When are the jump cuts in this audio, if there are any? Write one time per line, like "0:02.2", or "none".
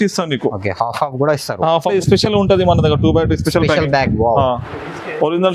0:01.9